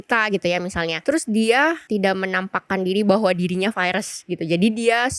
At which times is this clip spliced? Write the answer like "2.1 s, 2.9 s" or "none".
1.0 s, 1.8 s